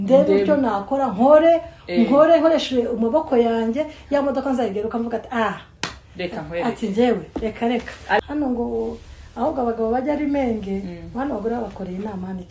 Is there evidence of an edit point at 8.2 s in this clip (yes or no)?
yes